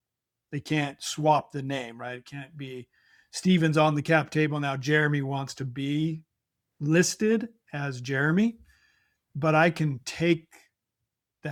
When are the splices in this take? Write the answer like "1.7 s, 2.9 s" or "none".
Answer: none